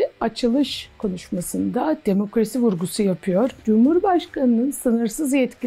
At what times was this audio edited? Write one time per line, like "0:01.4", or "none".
none